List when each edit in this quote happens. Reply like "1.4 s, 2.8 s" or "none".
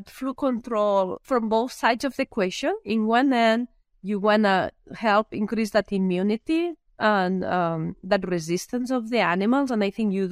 1.2 s